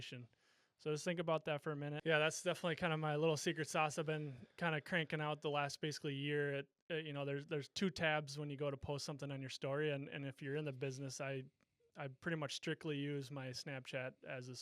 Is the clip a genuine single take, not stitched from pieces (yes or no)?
no